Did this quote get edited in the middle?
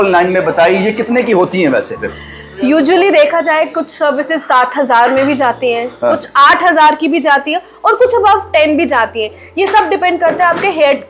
no; 0 cuts

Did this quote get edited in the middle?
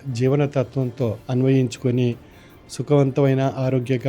yes; 1 cut; at 1.2 s

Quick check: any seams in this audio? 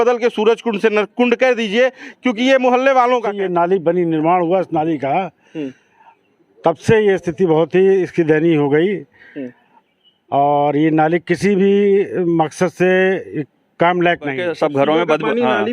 yes; 2 cuts; at 3.3 s, 14.4 s

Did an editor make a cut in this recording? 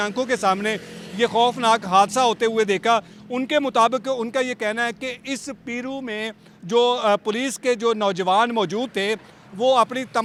no; 0 cuts

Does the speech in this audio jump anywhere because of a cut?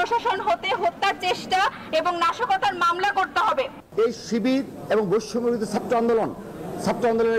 yes; 1 cut; at 3.8 s

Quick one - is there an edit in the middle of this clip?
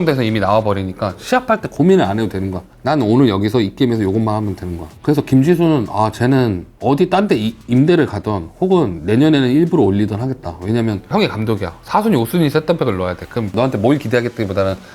yes; 4 cuts; at 1.7 s, 6.7 s, 11.1 s, 13.5 s

